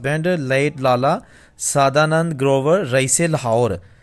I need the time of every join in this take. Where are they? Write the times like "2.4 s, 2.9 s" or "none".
none